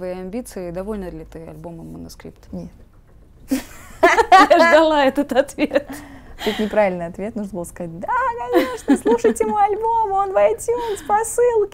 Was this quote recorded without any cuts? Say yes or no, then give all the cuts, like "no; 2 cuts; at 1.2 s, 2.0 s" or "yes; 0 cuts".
yes; 0 cuts